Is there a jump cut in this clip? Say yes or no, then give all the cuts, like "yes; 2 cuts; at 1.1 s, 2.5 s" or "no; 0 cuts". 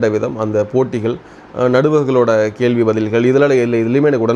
no; 0 cuts